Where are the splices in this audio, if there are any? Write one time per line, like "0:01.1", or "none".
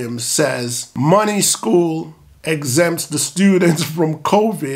none

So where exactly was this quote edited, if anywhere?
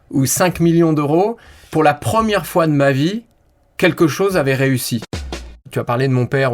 0:05.2

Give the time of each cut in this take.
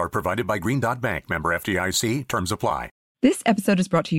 0:03.1

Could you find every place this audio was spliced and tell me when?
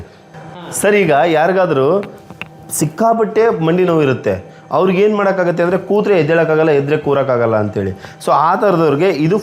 none

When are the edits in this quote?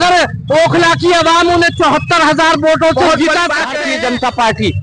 0:03.8

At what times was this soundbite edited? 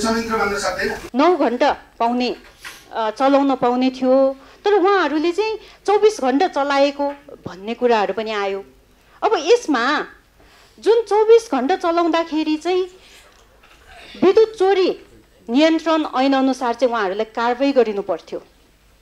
0:01.0

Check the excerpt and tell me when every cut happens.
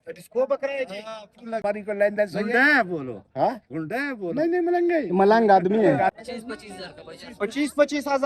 0:01.6
0:06.1

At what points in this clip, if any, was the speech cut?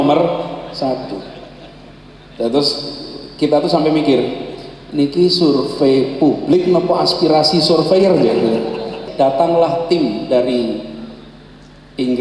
0:09.0

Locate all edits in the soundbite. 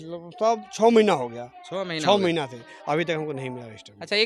none

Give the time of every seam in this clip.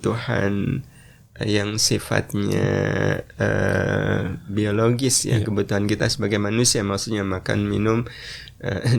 none

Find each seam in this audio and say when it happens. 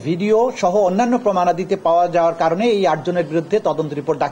none

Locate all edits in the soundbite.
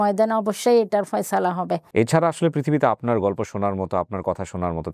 0:01.8

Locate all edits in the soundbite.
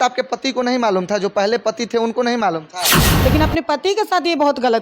0:03.0

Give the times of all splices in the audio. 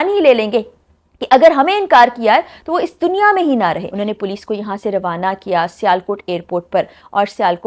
0:03.9

